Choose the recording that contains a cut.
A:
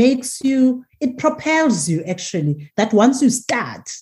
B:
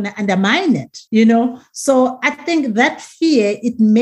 B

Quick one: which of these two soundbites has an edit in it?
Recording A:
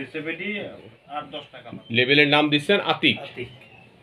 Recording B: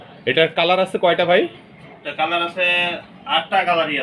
A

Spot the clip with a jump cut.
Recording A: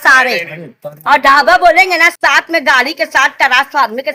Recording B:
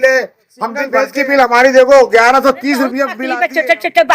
B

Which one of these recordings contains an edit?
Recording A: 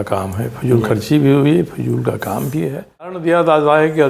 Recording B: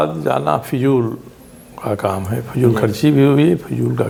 A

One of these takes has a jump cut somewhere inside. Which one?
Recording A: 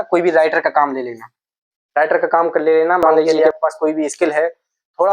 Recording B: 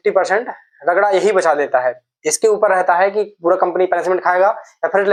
A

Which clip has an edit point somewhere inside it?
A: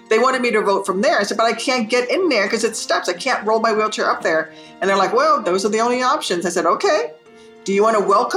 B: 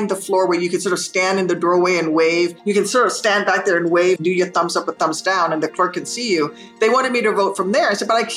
B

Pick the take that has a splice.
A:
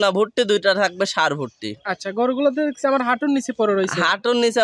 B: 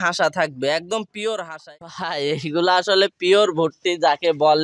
B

